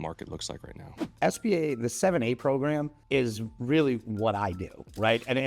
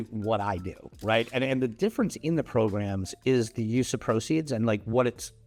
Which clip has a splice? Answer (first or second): first